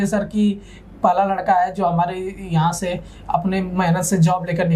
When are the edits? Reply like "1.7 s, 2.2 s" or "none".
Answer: none